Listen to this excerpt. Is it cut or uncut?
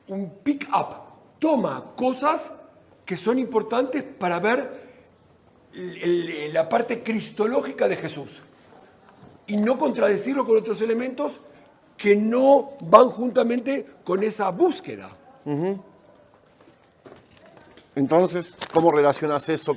uncut